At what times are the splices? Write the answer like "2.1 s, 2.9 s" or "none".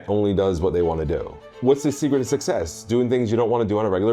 1.5 s